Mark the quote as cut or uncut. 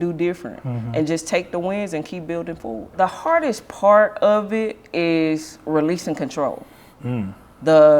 cut